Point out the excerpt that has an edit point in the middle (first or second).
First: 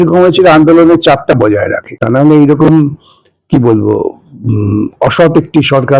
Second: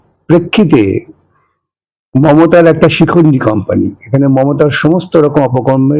first